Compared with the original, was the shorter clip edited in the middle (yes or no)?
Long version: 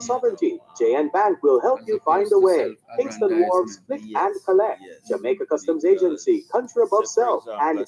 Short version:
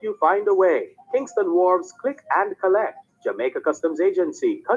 no